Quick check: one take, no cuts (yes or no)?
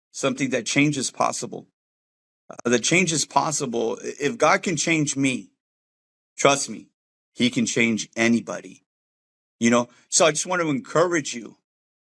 yes